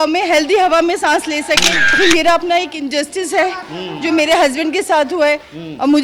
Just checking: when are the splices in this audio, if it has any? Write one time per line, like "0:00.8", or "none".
0:02.0

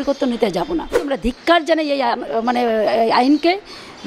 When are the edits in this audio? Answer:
0:01.1

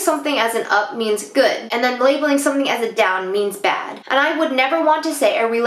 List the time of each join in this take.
none

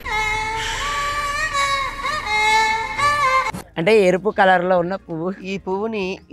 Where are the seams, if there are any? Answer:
0:03.5

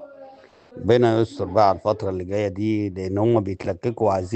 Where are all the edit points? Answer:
none

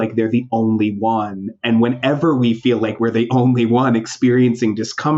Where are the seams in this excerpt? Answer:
none

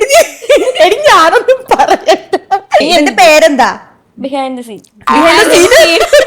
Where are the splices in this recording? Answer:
0:02.8

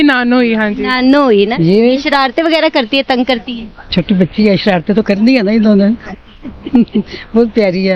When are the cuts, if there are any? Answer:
0:01.5
0:06.0

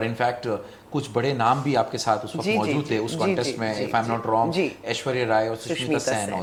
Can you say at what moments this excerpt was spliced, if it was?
none

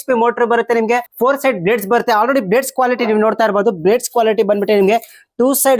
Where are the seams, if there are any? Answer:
0:01.1

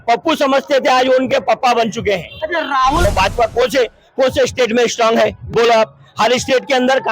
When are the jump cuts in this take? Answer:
0:03.1

